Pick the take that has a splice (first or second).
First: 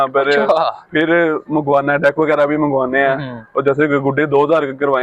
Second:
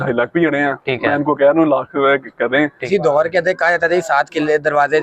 second